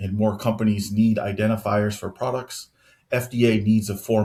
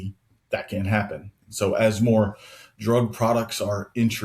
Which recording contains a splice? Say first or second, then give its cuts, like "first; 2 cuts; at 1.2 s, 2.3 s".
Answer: second; 1 cut; at 1.4 s